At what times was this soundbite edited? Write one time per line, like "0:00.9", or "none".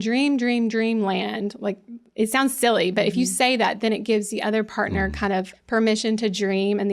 0:05.6